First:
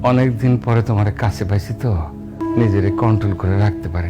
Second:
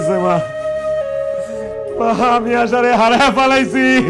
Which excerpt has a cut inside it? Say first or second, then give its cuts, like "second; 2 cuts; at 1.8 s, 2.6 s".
first; 1 cut; at 2.4 s